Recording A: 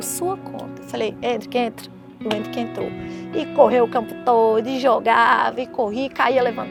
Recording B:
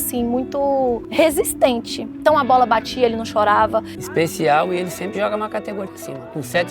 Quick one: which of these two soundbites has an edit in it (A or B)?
B